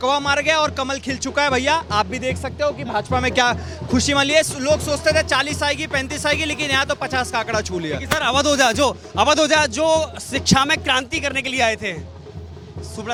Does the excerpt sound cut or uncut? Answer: uncut